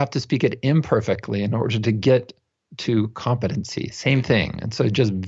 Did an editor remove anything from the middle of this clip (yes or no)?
no